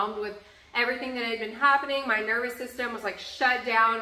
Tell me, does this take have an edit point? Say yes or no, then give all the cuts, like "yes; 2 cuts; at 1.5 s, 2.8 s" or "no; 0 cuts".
no; 0 cuts